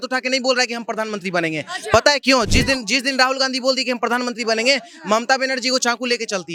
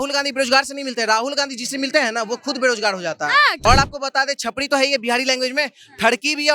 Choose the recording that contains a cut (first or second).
second